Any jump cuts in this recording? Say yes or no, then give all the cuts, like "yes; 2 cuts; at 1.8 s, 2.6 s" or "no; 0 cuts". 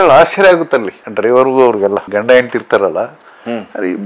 no; 0 cuts